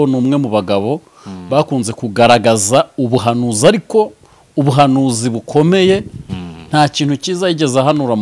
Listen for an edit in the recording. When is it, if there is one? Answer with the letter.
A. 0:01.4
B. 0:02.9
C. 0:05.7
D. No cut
D